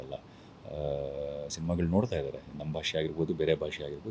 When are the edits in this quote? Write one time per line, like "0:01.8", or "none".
none